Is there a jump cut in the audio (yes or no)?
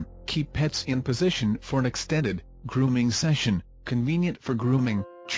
no